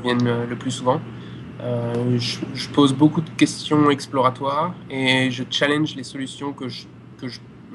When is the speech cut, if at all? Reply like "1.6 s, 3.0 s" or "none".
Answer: none